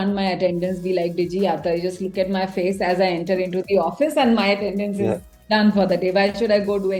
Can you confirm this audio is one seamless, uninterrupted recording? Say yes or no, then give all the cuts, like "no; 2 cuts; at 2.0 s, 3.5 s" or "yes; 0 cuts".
yes; 0 cuts